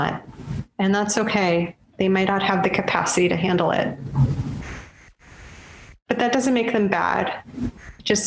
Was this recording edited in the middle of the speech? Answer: no; 0 cuts

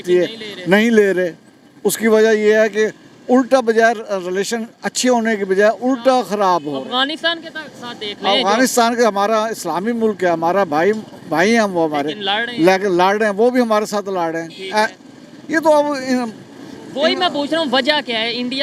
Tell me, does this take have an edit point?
no; 0 cuts

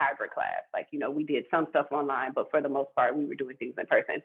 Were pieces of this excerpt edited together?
no; 0 cuts

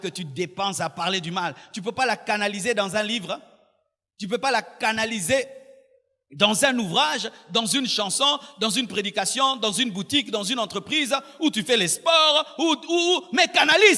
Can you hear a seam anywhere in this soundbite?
no; 0 cuts

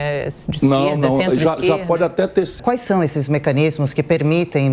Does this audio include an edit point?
yes; 1 cut; at 2.5 s

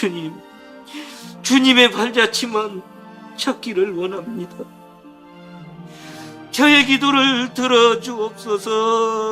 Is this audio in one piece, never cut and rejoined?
no; 1 cut; at 2.2 s

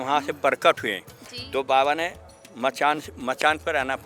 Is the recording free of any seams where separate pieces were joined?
yes; 0 cuts

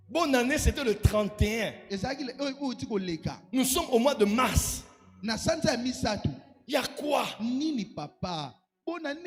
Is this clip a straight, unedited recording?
yes; 0 cuts

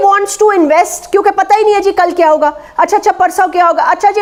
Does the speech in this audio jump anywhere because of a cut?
no; 0 cuts

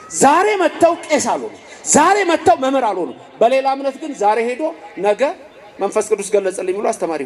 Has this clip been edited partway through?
no; 0 cuts

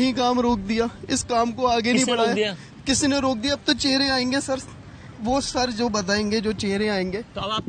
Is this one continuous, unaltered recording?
yes; 0 cuts

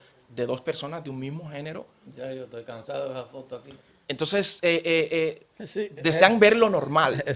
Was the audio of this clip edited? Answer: no; 0 cuts

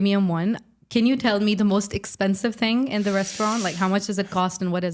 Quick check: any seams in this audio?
no; 0 cuts

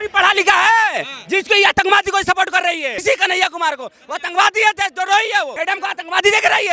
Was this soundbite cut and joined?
yes; 2 cuts; at 2.9 s, 5.5 s

